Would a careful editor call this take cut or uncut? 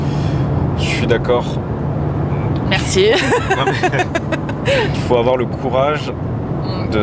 uncut